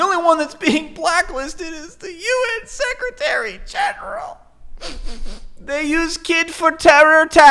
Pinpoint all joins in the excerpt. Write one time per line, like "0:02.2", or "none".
none